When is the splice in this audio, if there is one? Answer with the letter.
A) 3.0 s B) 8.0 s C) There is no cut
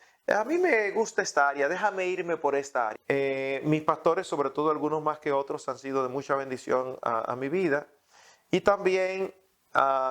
A